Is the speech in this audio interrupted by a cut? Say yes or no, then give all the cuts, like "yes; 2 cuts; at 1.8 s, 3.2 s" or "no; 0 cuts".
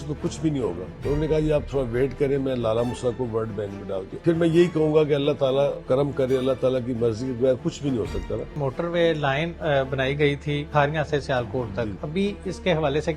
yes; 6 cuts; at 0.9 s, 4.1 s, 5.8 s, 8.5 s, 10.7 s, 12.0 s